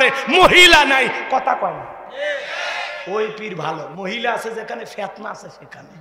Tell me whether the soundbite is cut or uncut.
uncut